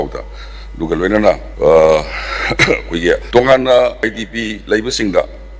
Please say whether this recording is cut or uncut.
cut